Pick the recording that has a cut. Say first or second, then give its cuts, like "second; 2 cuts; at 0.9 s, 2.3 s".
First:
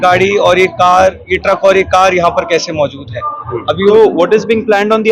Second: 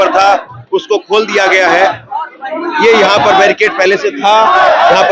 first; 1 cut; at 3.9 s